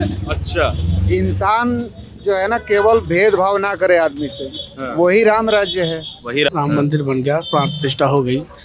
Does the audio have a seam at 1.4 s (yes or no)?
no